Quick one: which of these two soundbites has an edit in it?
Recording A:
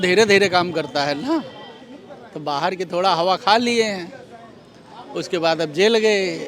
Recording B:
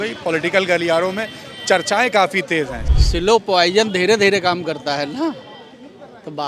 B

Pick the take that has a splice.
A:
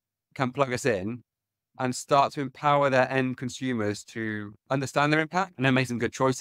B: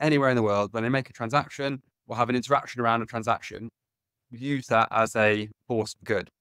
A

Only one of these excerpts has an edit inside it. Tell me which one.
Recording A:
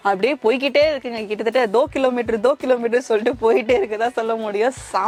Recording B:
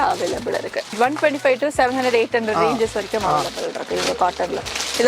B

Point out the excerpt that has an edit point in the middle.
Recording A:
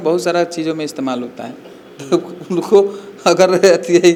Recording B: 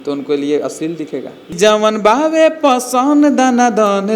B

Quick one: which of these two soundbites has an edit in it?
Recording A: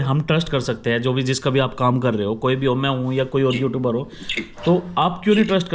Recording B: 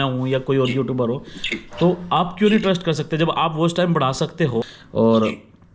B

